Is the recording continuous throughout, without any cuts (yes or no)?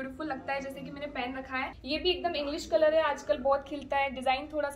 no